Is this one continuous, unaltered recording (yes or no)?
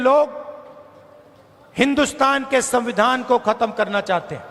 yes